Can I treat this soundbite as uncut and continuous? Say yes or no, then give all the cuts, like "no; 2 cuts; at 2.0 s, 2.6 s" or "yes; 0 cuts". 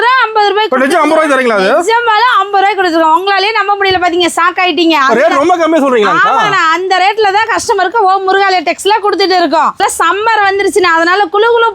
no; 1 cut; at 9.8 s